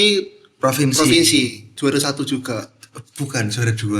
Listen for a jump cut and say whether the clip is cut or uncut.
cut